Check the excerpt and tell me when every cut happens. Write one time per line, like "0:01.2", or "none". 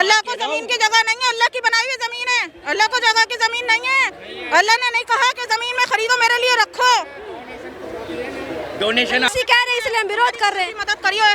0:09.3